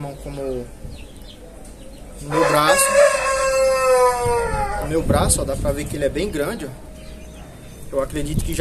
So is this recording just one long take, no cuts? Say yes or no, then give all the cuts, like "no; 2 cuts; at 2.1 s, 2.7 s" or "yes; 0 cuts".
yes; 0 cuts